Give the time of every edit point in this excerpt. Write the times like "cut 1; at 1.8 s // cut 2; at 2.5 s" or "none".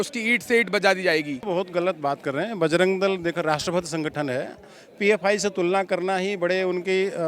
cut 1; at 1.4 s